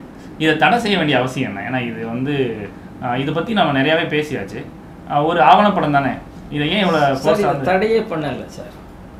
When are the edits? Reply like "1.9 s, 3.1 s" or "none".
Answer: none